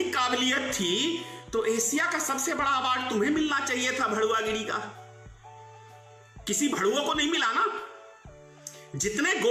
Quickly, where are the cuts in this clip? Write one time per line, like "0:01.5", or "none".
none